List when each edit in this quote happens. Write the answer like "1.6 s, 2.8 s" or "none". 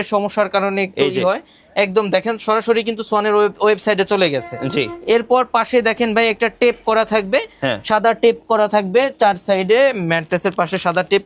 none

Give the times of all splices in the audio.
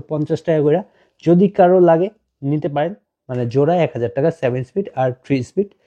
3.0 s

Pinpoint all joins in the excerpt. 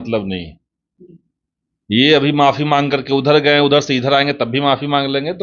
none

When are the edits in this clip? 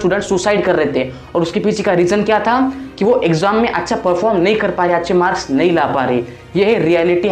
none

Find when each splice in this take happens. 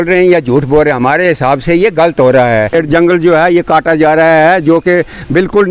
2.7 s

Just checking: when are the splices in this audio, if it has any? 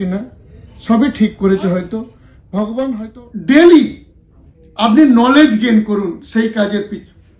3.1 s

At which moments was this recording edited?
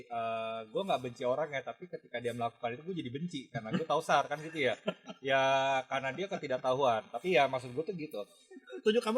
none

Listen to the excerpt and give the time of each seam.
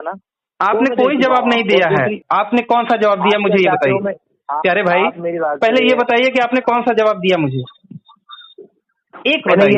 2.3 s

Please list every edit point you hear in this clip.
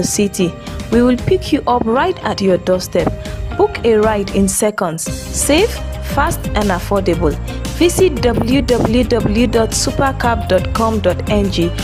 none

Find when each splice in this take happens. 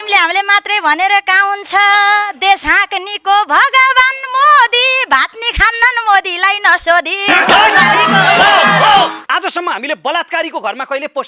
9.2 s

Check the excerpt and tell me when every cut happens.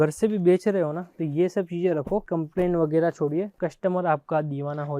2.2 s

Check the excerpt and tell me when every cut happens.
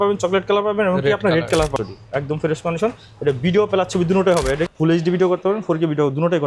1.7 s, 4.7 s

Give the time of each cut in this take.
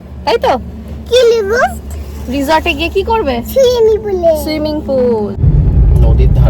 5.4 s

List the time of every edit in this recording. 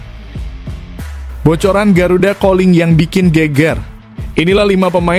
1.2 s

